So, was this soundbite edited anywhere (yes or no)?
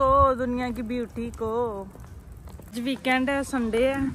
no